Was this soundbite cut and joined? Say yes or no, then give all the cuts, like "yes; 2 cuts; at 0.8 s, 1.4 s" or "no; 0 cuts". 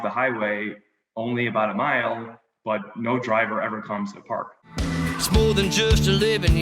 yes; 1 cut; at 4.7 s